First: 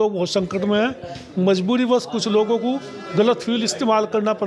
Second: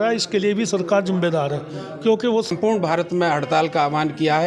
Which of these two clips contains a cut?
second; 1 cut; at 2.5 s

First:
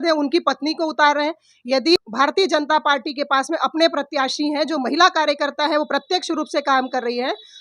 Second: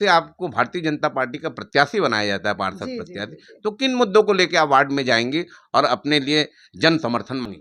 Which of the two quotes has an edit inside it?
first; 1 cut; at 2.0 s

